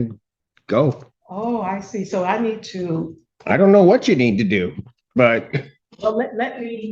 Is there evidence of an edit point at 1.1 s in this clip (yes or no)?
yes